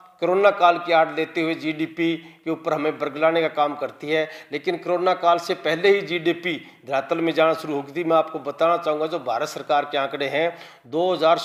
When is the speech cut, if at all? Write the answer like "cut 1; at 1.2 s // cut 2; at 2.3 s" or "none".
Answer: none